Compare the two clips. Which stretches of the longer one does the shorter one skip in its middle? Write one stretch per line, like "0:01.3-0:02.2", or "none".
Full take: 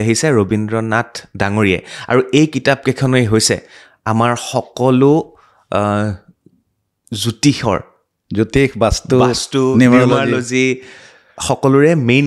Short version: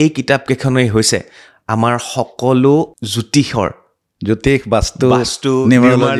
0:05.4-0:07.1

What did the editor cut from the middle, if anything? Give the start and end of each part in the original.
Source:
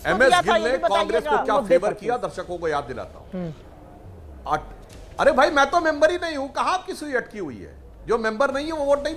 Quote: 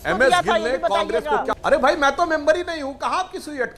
0:01.5-0:05.0

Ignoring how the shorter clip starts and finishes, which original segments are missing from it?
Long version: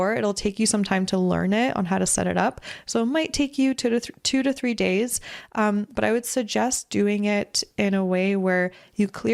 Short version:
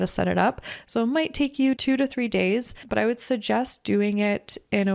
0:03.8-0:04.2
0:05.3-0:05.9

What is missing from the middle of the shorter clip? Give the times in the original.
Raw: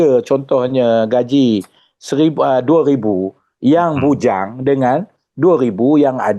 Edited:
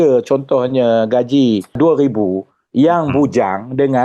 0:01.8-0:02.6

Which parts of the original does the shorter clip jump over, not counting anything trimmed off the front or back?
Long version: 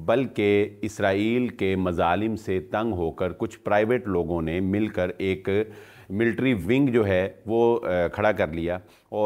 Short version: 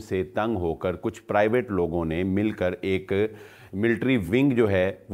none

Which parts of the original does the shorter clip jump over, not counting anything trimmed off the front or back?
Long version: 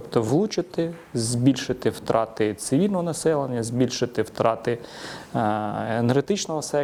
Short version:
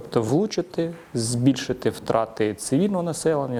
none

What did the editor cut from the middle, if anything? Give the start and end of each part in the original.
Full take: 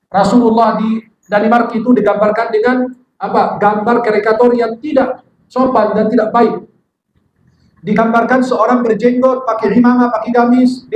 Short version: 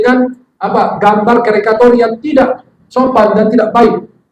none

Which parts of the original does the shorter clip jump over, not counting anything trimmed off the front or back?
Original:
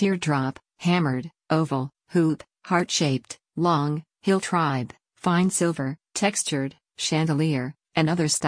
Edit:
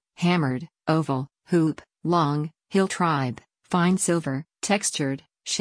0:02.5-0:03.4

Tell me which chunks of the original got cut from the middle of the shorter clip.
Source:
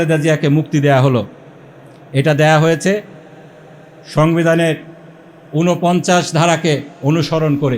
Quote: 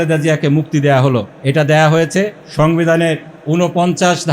0:01.3-0:02.0
0:03.1-0:04.0
0:04.9-0:05.4

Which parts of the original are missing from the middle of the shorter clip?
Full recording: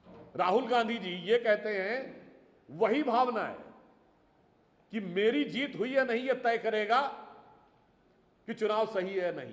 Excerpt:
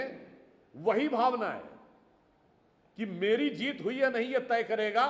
none

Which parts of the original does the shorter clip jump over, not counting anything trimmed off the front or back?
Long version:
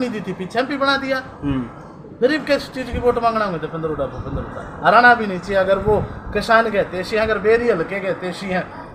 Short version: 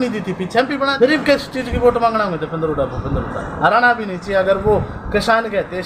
0:00.9-0:02.1

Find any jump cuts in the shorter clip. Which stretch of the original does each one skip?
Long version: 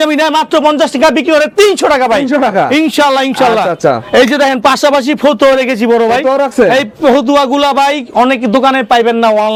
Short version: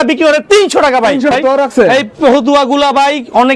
0:02.4-0:06.1

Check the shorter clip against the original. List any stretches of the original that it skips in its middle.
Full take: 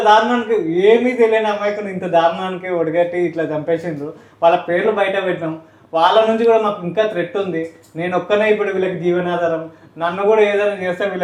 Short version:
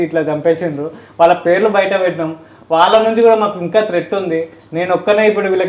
none

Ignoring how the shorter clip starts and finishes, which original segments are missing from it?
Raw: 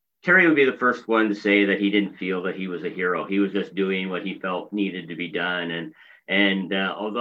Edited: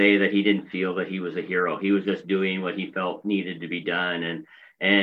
none

